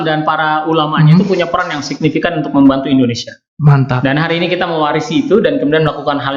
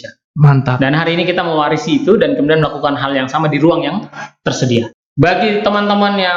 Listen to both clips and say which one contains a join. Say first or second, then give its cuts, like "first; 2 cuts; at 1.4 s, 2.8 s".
second; 1 cut; at 4.9 s